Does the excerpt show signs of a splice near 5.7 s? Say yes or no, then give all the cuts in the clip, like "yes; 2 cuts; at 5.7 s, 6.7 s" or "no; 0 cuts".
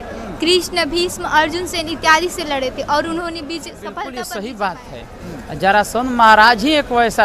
no; 1 cut; at 3.9 s